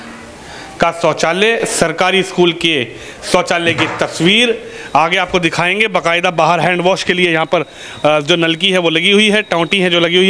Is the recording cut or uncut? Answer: uncut